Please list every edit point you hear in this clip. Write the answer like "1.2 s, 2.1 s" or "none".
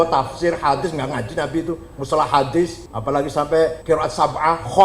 2.9 s, 3.8 s